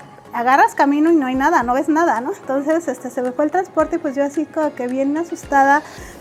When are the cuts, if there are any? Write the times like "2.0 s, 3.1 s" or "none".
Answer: none